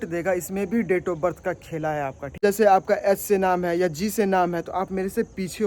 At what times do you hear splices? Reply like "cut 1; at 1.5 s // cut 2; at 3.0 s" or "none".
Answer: cut 1; at 2.4 s